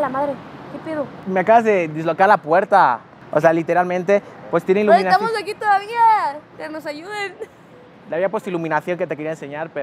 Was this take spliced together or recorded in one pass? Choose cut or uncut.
uncut